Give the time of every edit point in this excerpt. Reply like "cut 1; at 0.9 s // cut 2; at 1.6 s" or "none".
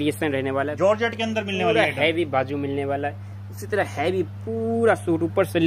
none

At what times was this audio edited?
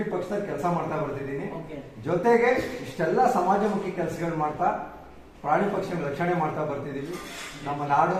none

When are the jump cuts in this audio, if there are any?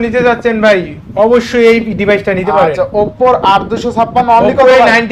none

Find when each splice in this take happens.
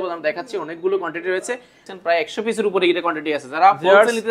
cut 1; at 1.8 s

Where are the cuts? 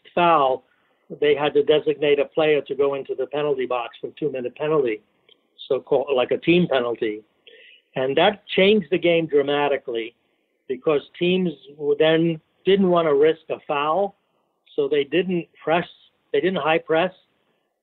cut 1; at 12.5 s

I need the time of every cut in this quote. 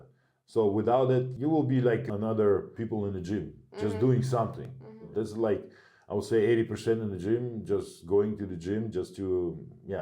cut 1; at 1.3 s // cut 2; at 2.1 s // cut 3; at 2.7 s

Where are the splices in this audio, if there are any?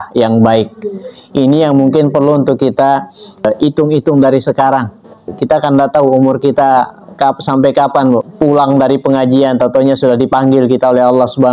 cut 1; at 3.4 s // cut 2; at 5.3 s // cut 3; at 8.3 s

